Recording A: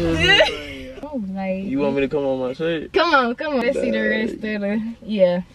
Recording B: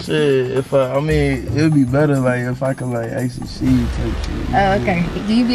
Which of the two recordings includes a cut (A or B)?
A